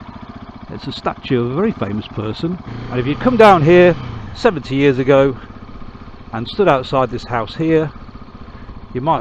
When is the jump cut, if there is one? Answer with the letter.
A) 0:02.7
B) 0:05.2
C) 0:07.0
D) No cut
A